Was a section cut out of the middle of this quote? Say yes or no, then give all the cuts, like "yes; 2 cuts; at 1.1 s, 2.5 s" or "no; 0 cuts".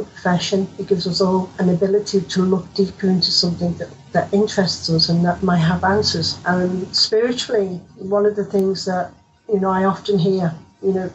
yes; 2 cuts; at 1.5 s, 6.3 s